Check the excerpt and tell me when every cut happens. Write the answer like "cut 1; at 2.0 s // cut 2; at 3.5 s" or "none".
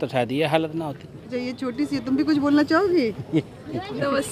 none